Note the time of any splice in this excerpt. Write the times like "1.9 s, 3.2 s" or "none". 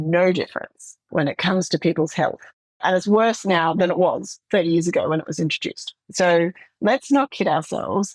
1.0 s, 2.8 s, 3.7 s